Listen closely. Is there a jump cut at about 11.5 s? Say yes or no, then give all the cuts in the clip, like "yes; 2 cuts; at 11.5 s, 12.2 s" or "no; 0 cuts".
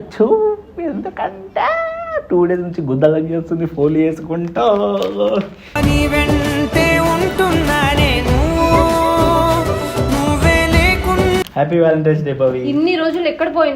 yes; 1 cut; at 11.5 s